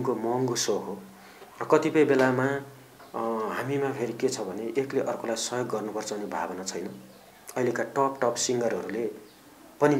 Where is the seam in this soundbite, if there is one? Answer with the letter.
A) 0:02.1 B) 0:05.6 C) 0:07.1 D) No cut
D